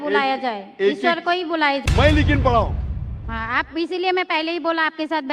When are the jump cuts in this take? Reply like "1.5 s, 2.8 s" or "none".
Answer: 1.8 s